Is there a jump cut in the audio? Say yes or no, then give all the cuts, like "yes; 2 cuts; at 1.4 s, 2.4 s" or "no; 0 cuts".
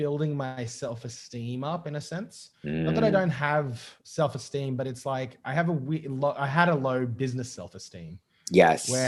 no; 0 cuts